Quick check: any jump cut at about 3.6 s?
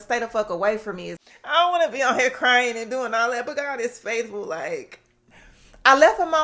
no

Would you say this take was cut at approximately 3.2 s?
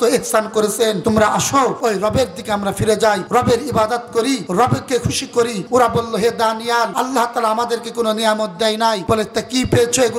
yes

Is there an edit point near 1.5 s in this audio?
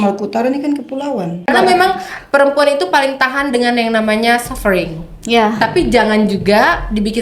yes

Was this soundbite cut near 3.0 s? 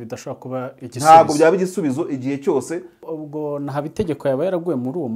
yes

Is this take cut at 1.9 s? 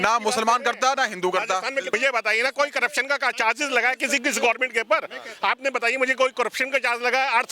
yes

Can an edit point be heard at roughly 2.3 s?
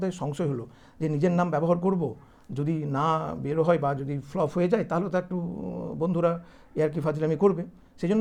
no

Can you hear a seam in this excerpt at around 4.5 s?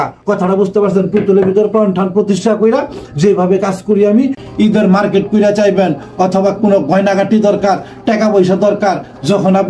yes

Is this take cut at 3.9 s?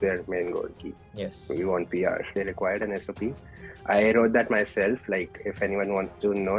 no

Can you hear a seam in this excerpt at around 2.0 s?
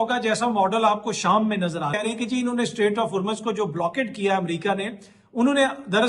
yes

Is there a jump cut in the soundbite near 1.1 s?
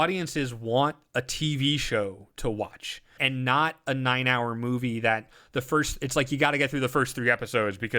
no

